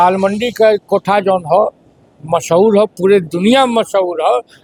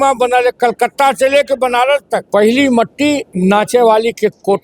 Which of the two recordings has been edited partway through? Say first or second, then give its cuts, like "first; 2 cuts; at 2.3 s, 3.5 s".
second; 2 cuts; at 2.2 s, 3.3 s